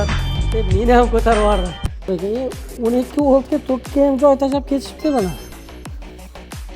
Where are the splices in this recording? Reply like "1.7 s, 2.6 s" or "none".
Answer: 2.1 s